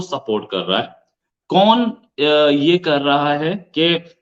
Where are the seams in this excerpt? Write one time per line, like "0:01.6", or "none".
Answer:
none